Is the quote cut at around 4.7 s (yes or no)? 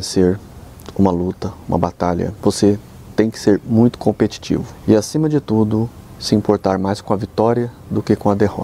yes